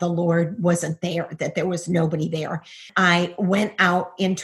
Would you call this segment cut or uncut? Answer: cut